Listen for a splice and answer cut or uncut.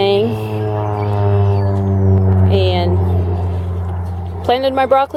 uncut